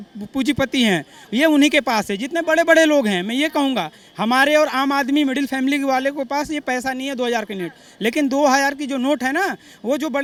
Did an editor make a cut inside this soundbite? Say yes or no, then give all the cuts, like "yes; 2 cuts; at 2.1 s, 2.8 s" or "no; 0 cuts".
no; 0 cuts